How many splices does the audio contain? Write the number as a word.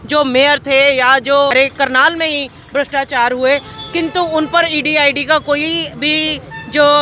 one